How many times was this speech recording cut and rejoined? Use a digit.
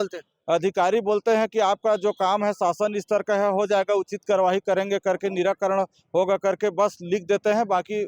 0